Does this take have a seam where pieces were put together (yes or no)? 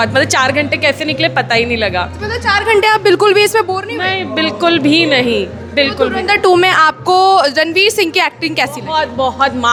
no